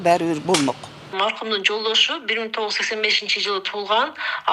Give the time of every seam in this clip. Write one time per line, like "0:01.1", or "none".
0:01.1